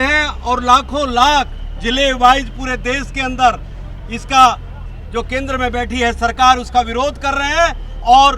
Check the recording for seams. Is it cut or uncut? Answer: uncut